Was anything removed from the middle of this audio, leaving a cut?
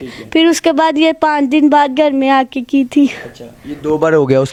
no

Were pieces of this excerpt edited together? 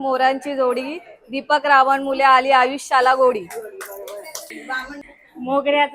yes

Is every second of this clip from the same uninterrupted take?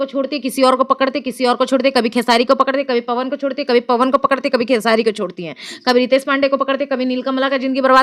yes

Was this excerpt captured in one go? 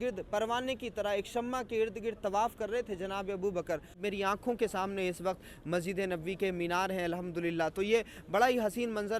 no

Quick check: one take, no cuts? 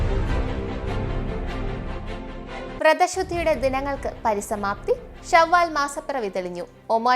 no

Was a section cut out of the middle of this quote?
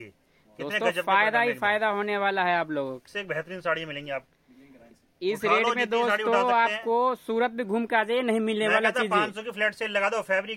yes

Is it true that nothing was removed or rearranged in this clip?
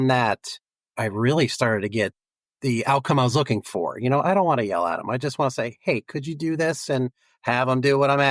yes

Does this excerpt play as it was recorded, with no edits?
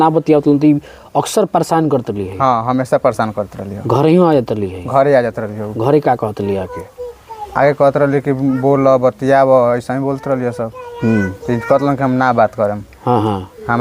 yes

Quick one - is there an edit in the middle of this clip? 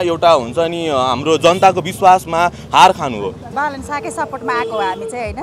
yes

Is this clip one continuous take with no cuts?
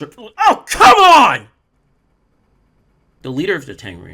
no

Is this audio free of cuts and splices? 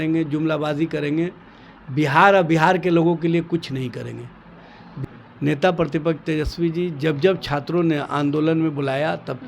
no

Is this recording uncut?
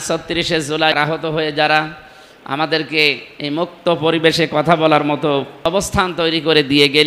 no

